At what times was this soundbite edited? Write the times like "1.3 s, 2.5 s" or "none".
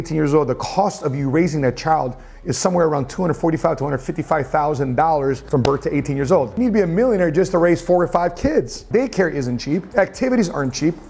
6.5 s, 8.8 s